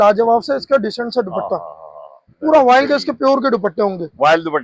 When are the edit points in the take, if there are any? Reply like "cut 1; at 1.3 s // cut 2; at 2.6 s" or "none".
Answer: none